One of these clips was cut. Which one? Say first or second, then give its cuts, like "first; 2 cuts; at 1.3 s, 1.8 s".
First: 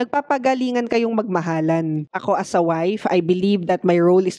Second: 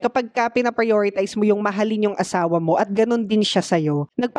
first; 1 cut; at 2.0 s